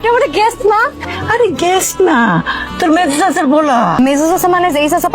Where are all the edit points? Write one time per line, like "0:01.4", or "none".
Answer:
0:04.0